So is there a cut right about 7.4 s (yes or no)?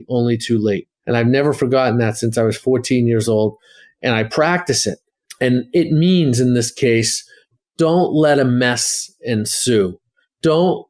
yes